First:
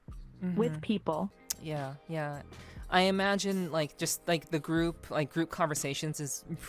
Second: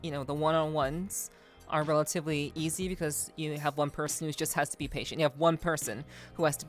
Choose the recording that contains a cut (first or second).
first